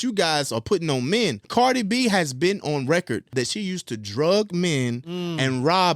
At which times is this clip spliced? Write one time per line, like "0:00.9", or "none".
0:01.4
0:03.3